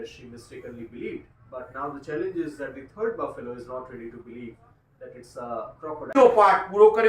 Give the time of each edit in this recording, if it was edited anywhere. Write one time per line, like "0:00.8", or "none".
0:06.1